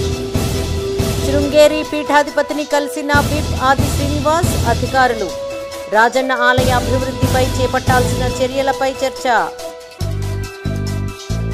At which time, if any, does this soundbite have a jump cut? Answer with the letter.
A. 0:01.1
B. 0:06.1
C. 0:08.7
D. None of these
A